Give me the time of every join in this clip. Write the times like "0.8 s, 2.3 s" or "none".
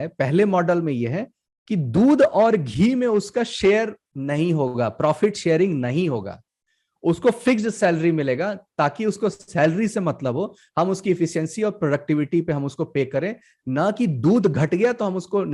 none